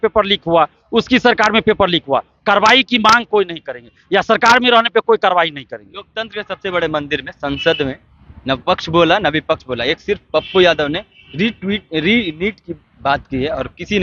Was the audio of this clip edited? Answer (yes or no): no